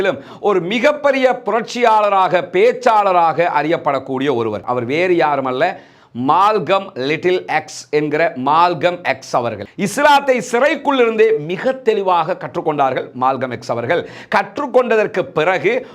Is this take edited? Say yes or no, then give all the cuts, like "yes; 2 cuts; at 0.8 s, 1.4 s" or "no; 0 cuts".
yes; 2 cuts; at 4.6 s, 9.7 s